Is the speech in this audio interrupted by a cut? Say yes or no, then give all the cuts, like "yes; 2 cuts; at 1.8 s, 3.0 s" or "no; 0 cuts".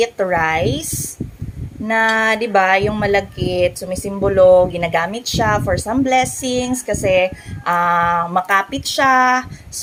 no; 0 cuts